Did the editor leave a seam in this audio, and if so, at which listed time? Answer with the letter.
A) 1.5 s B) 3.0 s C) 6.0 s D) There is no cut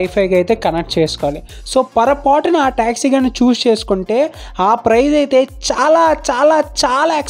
A